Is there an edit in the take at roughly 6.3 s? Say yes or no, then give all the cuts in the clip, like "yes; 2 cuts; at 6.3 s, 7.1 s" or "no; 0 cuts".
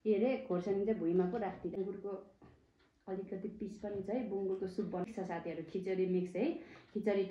no; 2 cuts; at 1.8 s, 5.1 s